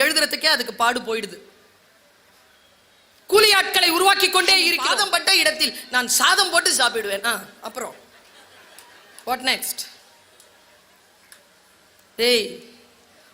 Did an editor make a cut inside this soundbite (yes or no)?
yes